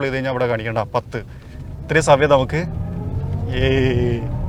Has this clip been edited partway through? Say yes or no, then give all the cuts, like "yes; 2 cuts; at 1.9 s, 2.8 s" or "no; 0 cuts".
no; 0 cuts